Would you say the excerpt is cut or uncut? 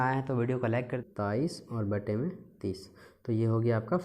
cut